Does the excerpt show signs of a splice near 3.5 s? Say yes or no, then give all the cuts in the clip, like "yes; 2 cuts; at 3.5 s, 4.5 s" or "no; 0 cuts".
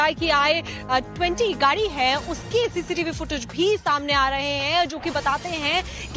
no; 1 cut; at 1.1 s